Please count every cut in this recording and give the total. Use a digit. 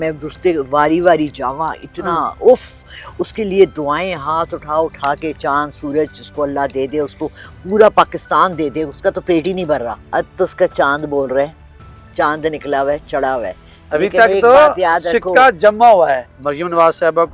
2